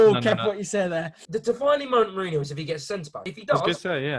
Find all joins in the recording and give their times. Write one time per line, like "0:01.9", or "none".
0:01.2
0:03.2